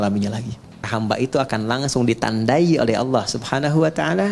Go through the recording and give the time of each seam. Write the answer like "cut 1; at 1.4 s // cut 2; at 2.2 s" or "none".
cut 1; at 0.9 s